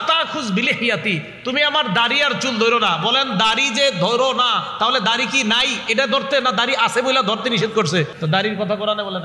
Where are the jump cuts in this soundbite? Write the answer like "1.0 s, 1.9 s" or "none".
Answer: 8.2 s